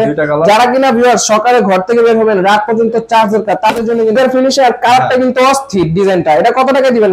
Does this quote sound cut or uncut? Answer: cut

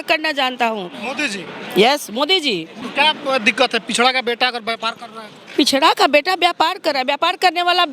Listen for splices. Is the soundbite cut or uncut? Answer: cut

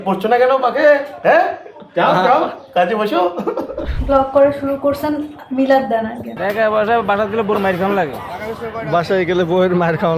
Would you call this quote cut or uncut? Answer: cut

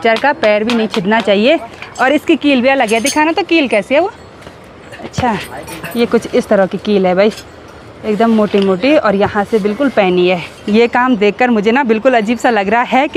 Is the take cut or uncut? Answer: uncut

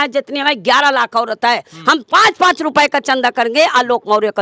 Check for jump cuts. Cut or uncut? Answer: uncut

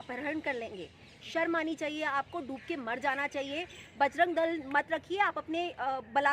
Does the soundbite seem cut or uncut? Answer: uncut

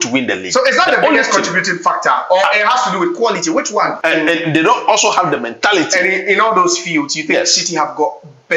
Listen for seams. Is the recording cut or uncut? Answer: cut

